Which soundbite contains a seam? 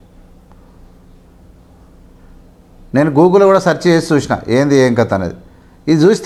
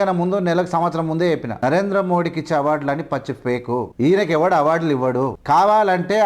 second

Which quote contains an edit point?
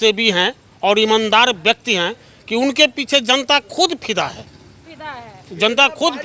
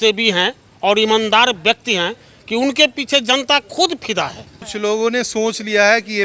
second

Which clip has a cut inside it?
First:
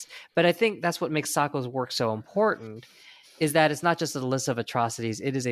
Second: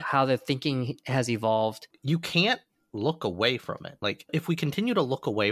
second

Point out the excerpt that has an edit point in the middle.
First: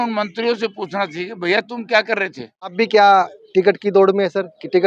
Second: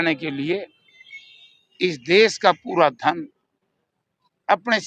first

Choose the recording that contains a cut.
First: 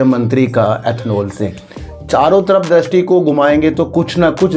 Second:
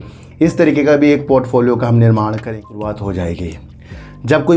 second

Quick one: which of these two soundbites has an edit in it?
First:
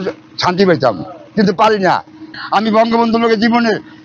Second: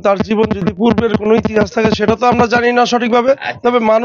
first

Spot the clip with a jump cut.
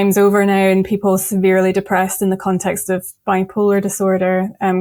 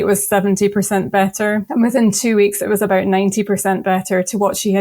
second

